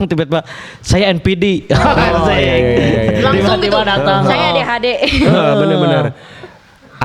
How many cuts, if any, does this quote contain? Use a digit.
0